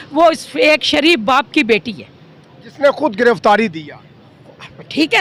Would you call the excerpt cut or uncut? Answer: uncut